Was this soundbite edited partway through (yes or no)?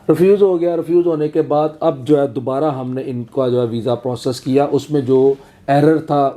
no